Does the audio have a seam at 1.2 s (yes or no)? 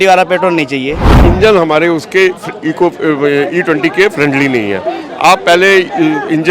yes